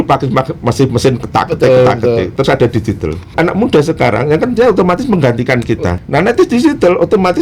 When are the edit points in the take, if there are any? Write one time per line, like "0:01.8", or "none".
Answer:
0:03.3
0:05.9